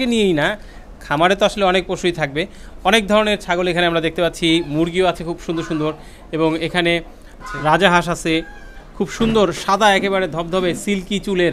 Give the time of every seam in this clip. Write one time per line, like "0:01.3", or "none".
none